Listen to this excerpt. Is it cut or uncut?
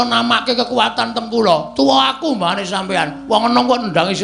uncut